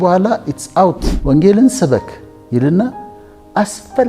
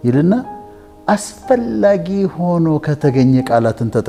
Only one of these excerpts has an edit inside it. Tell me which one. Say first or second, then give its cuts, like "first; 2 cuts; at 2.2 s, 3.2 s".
first; 1 cut; at 1.4 s